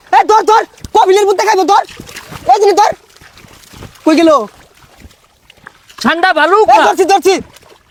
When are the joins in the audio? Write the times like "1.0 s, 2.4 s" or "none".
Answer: none